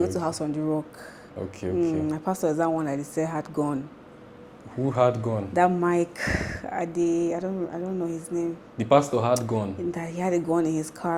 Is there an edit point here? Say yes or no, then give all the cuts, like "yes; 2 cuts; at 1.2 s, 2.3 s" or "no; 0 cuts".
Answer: no; 0 cuts